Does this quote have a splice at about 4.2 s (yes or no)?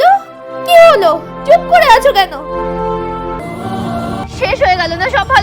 yes